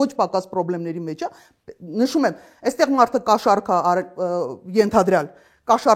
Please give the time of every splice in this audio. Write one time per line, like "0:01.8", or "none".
none